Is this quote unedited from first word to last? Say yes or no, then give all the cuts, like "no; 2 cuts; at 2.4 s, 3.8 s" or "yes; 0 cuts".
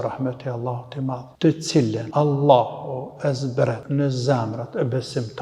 no; 3 cuts; at 1.3 s, 2.0 s, 3.8 s